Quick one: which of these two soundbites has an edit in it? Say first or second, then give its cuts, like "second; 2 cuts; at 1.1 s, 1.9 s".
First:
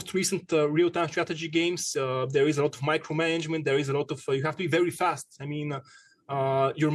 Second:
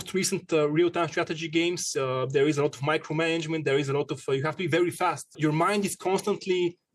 second; 1 cut; at 5.4 s